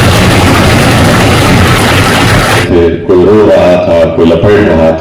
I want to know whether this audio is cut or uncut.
cut